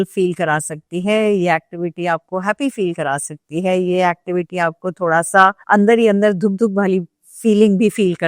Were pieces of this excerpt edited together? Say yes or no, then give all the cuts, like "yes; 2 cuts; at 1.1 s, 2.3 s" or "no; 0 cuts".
no; 0 cuts